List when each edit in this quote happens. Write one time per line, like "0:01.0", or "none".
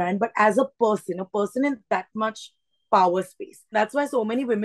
0:03.7